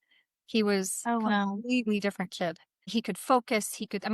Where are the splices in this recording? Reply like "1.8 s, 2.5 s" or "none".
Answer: 2.7 s